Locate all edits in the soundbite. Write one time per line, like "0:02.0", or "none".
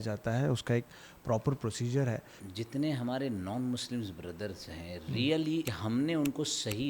0:02.3
0:05.7